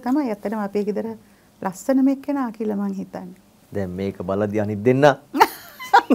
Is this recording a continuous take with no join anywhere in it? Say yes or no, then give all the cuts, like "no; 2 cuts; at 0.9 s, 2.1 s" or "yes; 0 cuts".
yes; 0 cuts